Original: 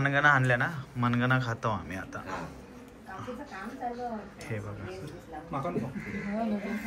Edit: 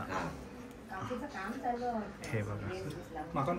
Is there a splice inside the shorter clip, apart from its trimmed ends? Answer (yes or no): no